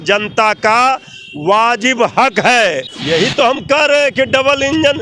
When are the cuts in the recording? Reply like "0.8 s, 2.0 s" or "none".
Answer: 2.9 s